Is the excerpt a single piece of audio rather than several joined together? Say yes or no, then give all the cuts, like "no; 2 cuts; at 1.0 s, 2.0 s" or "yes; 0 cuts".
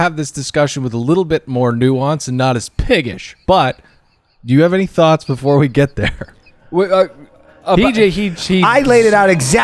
yes; 0 cuts